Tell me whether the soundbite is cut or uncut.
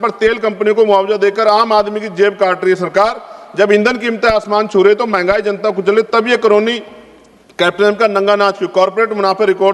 uncut